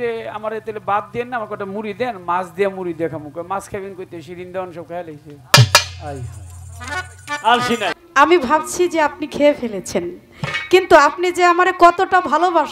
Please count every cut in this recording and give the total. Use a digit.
1